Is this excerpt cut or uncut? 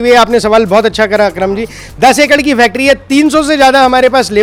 uncut